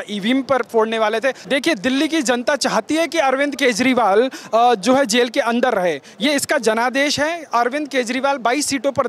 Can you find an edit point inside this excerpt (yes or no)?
yes